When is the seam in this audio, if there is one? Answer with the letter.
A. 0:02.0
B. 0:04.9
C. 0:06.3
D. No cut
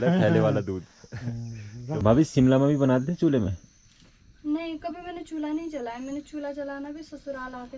A